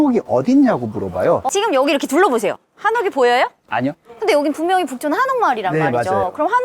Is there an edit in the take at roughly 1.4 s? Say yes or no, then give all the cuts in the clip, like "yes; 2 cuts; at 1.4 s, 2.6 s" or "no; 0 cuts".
yes; 2 cuts; at 1.4 s, 4.1 s